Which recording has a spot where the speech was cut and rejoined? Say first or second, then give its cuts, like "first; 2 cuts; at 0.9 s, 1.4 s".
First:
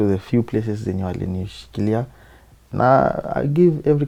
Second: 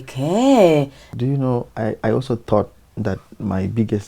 second; 1 cut; at 1.0 s